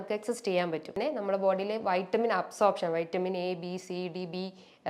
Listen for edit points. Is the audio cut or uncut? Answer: cut